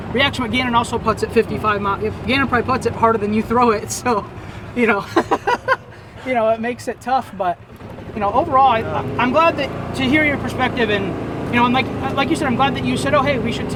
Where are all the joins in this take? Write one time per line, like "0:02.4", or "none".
none